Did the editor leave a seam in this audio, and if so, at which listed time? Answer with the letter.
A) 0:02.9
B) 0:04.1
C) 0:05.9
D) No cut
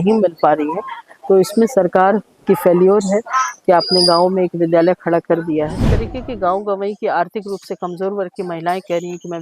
C